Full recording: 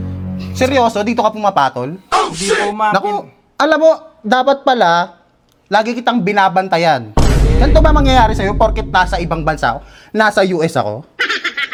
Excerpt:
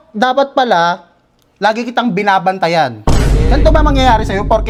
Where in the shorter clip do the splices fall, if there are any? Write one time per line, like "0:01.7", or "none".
none